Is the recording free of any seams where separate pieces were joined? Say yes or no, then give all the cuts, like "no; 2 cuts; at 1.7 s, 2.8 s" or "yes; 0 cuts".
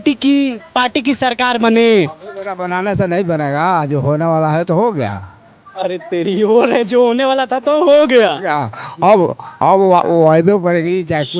yes; 0 cuts